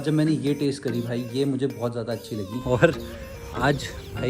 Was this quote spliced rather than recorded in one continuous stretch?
yes; 1 cut; at 2.6 s

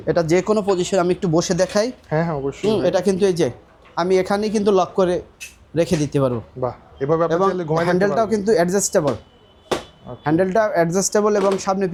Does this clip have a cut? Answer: no; 0 cuts

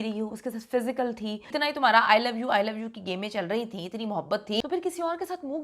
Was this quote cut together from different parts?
yes; 2 cuts; at 1.5 s, 4.6 s

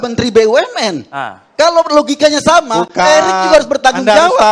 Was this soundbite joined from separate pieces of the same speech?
no; 0 cuts

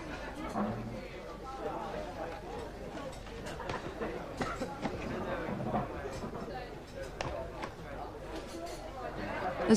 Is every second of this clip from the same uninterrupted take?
no; 1 cut; at 1.8 s

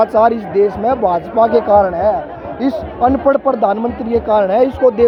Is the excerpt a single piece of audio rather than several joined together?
yes; 0 cuts

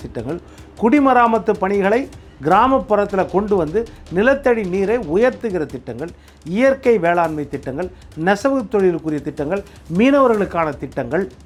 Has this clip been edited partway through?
no; 0 cuts

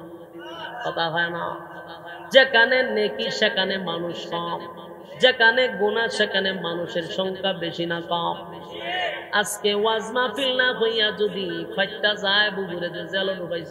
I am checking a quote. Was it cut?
no; 0 cuts

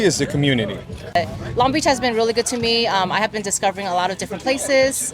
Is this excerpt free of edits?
no; 1 cut; at 1.2 s

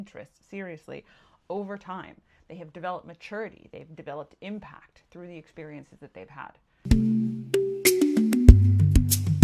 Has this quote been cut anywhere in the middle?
yes; 1 cut; at 6.6 s

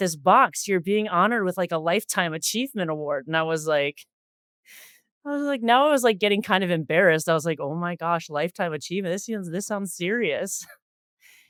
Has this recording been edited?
no; 0 cuts

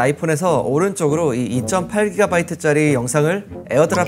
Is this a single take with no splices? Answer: yes; 0 cuts

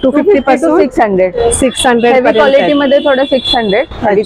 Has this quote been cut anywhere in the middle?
no; 0 cuts

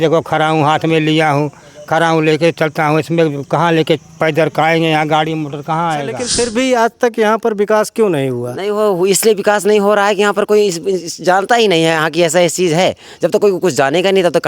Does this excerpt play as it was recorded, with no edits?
no; 1 cut; at 6.3 s

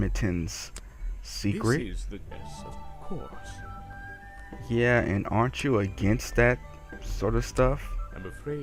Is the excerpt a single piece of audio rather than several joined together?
yes; 0 cuts

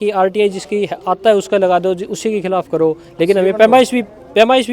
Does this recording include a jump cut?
no; 0 cuts

